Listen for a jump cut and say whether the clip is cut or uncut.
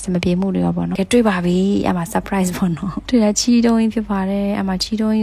cut